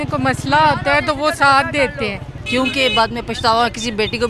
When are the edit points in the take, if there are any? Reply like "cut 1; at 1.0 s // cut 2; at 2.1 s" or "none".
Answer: cut 1; at 2.4 s